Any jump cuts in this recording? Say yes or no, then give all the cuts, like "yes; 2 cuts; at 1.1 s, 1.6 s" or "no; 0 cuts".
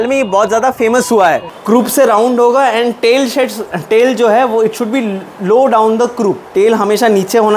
yes; 2 cuts; at 1.5 s, 6.4 s